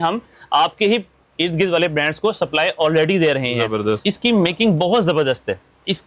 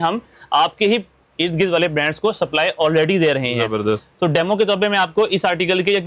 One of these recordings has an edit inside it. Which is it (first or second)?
first